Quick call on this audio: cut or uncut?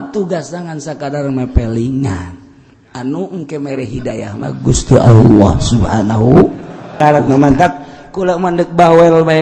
cut